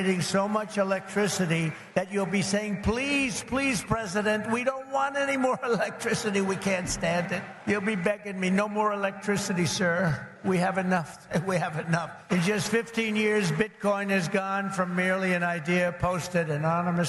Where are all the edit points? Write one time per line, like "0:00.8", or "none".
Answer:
0:01.8
0:07.5
0:10.3
0:12.1